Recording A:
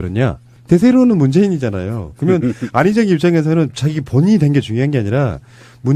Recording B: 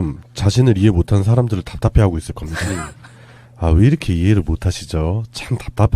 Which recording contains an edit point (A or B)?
B